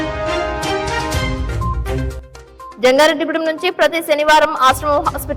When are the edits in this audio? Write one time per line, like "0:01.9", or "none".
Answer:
0:01.7